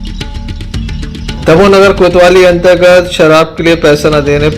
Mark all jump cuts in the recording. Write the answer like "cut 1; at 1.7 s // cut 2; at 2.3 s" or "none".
cut 1; at 1.3 s